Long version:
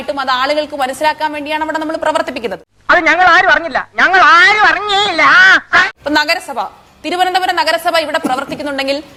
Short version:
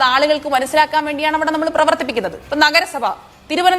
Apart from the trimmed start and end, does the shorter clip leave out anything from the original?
yes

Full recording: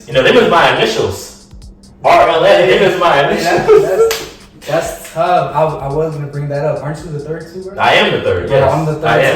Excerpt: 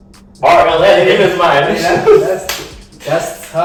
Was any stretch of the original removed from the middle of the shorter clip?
no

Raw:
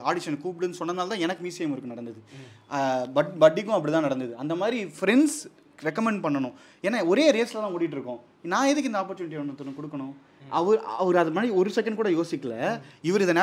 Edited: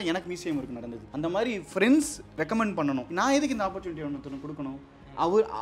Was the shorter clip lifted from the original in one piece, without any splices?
no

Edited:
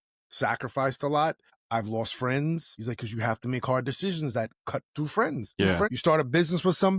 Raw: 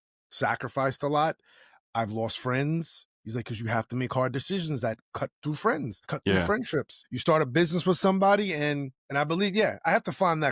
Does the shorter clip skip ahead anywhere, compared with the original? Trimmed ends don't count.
yes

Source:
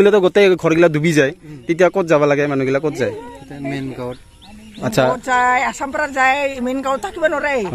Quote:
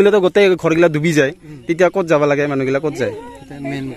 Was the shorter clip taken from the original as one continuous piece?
yes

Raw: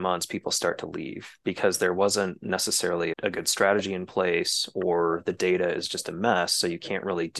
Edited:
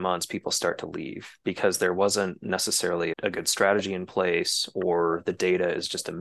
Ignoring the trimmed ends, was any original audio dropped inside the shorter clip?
no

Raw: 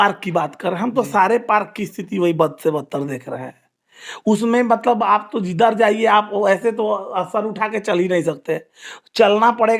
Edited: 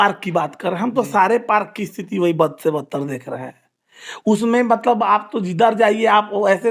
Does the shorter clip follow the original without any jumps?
yes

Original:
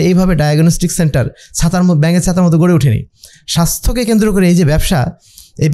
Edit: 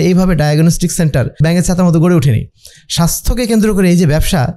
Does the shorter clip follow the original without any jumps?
no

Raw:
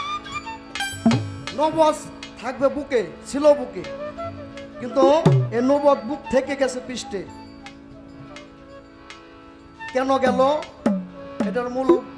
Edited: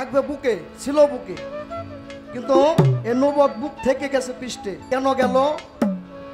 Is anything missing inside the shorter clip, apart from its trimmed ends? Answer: yes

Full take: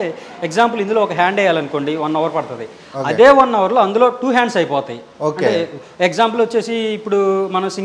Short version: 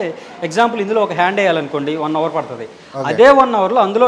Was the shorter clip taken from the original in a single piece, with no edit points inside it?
yes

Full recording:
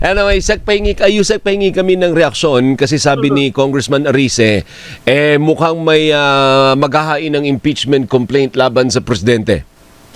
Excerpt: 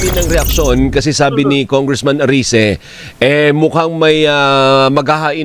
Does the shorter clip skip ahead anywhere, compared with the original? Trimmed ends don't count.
no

